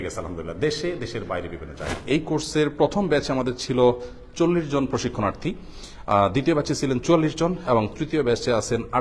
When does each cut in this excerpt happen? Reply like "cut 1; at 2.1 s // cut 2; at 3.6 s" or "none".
cut 1; at 2.0 s